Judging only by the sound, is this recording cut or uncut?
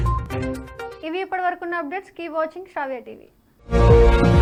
uncut